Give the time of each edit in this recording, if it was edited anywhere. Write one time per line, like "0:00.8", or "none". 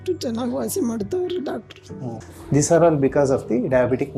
0:02.2